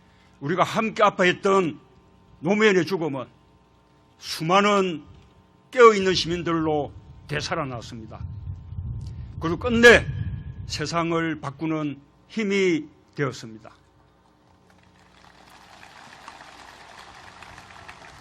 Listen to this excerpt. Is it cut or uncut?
uncut